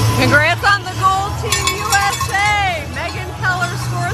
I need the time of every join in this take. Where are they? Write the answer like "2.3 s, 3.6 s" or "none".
none